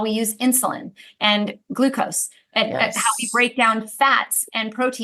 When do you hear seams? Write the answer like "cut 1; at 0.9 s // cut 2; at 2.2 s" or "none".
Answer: none

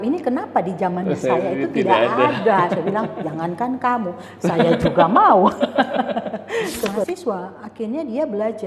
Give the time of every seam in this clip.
cut 1; at 7.1 s

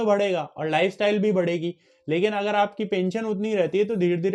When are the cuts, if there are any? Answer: none

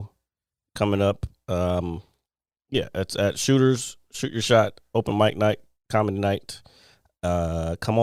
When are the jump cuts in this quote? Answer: none

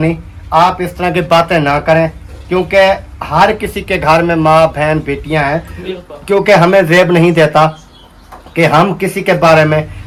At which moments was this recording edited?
none

